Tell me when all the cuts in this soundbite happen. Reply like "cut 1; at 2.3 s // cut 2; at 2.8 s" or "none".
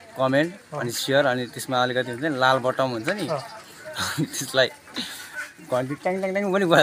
none